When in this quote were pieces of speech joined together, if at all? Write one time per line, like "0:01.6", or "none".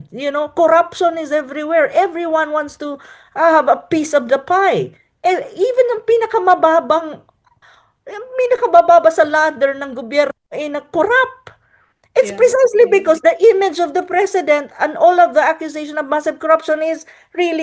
none